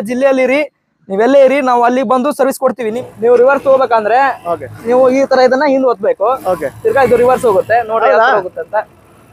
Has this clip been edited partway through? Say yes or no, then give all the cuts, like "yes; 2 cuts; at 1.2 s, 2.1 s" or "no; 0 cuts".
yes; 1 cut; at 2.8 s